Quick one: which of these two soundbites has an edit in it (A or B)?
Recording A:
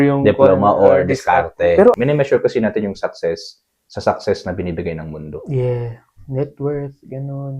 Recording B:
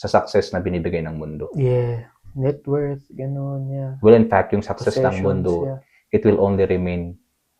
A